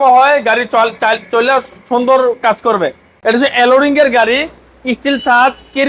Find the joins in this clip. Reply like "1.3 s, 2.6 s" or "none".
3.1 s